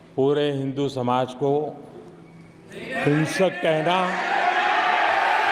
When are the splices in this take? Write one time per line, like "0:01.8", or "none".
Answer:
none